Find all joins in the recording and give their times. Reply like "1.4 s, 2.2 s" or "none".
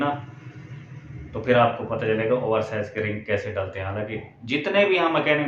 none